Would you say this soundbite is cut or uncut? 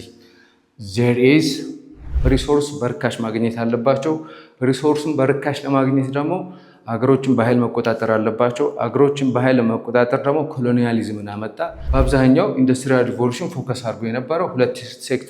cut